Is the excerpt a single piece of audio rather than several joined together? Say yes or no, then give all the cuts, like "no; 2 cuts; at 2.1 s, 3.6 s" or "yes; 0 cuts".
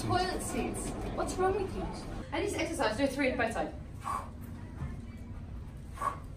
no; 1 cut; at 2.2 s